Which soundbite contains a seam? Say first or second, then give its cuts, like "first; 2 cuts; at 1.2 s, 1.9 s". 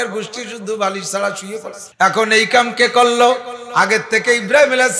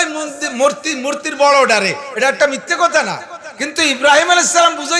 first; 1 cut; at 1.8 s